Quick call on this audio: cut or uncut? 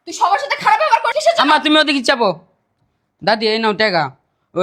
cut